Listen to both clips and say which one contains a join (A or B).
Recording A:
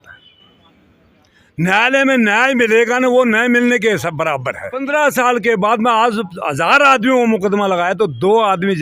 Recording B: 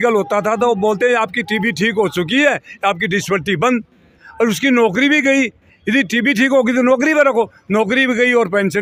A